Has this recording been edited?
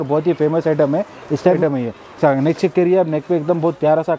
yes; 1 cut; at 1.6 s

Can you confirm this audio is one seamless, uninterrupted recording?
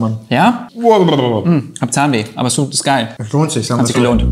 yes; 0 cuts

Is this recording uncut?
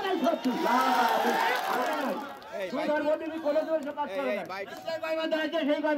yes; 0 cuts

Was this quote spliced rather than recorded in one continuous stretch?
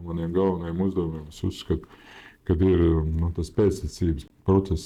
no; 0 cuts

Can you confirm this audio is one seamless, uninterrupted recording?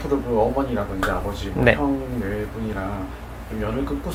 yes; 0 cuts

